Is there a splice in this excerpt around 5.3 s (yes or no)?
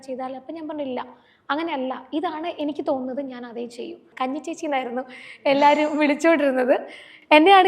no